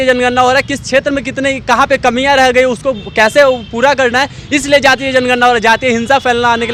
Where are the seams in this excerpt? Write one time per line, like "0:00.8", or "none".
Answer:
none